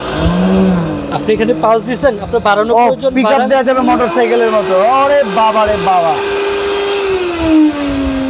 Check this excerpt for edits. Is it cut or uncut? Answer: uncut